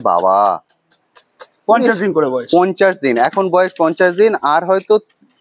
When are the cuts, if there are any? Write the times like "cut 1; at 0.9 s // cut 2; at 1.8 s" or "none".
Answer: none